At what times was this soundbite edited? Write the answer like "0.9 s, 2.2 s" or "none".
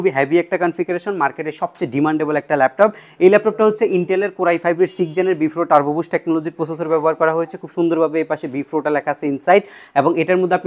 none

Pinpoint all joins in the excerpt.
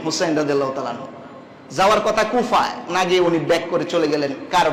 none

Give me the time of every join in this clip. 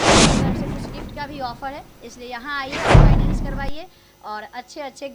1.1 s, 2.7 s, 3.6 s

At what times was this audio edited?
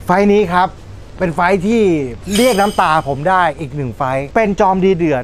2.2 s, 4.3 s

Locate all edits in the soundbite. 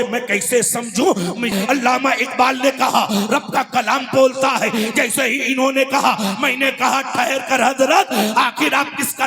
1.5 s

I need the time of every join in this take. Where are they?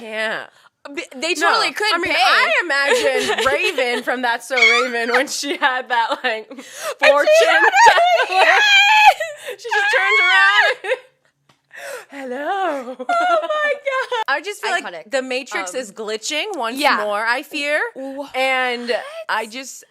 14.2 s

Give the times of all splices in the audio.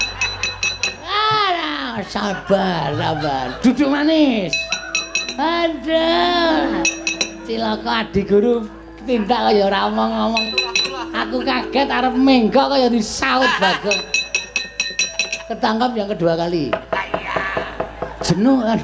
none

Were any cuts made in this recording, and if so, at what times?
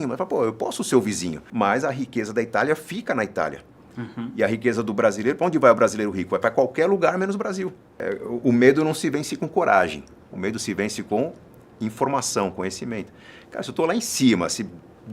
1.4 s, 8.0 s

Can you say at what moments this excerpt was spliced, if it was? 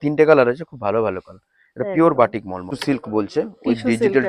2.7 s

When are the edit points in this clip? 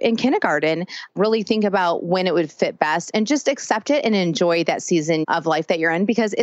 1.1 s, 5.2 s

